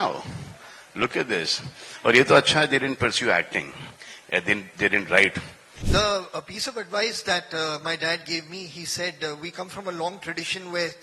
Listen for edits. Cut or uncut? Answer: cut